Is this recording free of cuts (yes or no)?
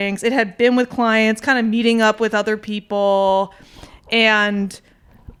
yes